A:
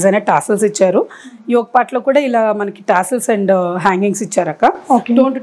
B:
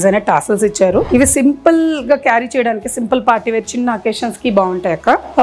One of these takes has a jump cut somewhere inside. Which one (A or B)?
B